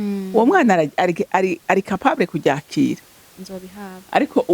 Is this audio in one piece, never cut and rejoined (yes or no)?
no